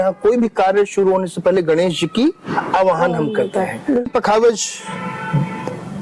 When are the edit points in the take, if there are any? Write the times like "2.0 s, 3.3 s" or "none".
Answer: 4.1 s